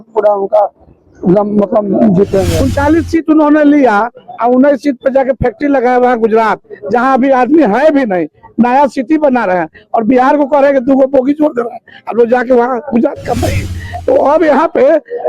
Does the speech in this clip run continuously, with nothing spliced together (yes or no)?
no